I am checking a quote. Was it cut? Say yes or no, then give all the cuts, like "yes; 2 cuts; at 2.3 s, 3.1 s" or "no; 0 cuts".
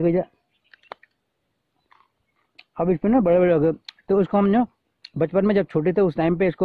no; 0 cuts